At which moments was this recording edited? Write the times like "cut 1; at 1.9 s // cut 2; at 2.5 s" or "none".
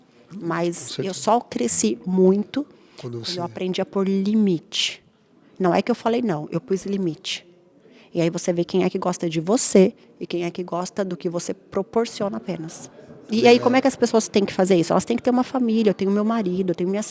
cut 1; at 13.1 s